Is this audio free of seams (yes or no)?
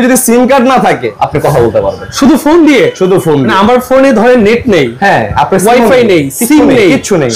no